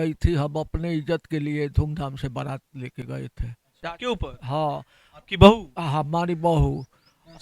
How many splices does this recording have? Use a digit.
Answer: 1